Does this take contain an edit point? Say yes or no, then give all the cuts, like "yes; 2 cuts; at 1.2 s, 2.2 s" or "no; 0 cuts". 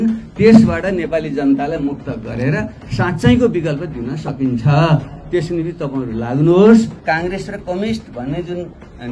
yes; 1 cut; at 7.0 s